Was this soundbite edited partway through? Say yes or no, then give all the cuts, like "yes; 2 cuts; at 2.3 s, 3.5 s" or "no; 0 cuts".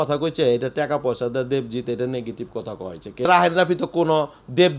yes; 1 cut; at 3.3 s